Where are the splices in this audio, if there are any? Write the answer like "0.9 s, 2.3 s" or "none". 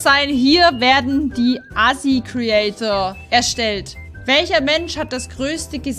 3.2 s